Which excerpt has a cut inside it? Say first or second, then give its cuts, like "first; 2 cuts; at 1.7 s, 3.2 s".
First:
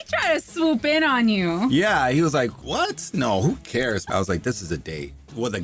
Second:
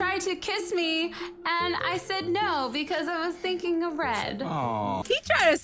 first; 1 cut; at 4.0 s